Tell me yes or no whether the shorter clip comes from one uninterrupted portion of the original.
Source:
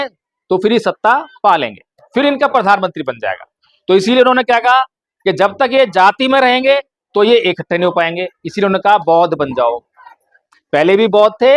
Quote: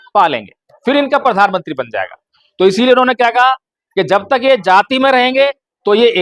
yes